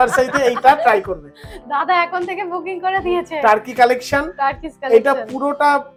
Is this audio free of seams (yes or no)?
yes